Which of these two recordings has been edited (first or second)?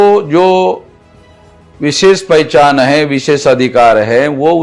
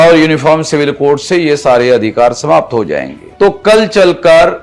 second